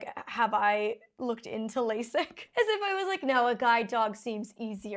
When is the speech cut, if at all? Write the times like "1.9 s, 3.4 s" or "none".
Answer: 2.4 s